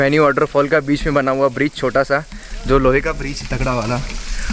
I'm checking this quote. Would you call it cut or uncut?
uncut